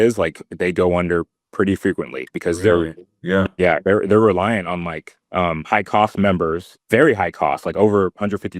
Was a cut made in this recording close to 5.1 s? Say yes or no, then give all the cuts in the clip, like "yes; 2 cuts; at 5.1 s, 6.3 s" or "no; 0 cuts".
yes; 2 cuts; at 5.1 s, 6.7 s